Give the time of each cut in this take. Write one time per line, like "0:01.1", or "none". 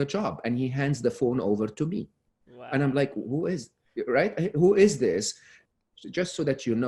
0:05.5